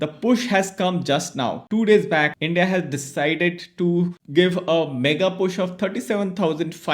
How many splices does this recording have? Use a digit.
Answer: 2